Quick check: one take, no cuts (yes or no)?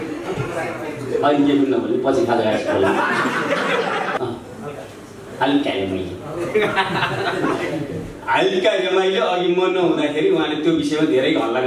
no